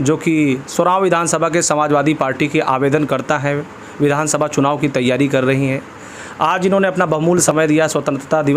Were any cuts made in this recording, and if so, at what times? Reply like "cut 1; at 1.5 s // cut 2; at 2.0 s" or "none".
cut 1; at 7.5 s